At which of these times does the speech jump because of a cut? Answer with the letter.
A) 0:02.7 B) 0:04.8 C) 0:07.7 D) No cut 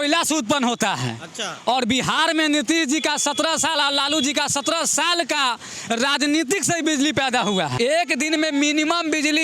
C